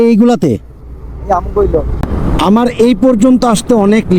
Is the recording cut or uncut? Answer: cut